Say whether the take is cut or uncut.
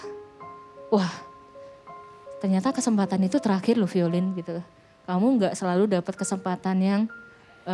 uncut